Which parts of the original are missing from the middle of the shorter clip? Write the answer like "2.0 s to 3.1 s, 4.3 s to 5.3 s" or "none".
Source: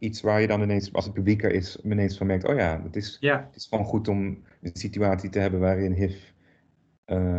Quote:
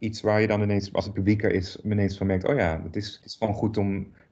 3.1 s to 3.5 s